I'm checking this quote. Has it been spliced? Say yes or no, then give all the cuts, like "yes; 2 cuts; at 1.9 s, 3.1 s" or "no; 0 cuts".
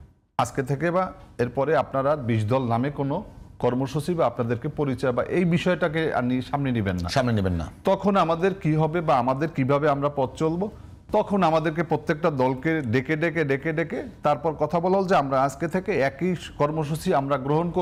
no; 0 cuts